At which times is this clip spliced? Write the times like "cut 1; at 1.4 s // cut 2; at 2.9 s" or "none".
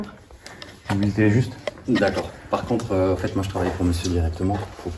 none